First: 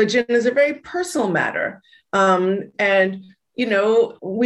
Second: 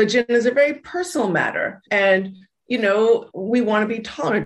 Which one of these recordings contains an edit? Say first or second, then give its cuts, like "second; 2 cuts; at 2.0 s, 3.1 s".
second; 1 cut; at 1.8 s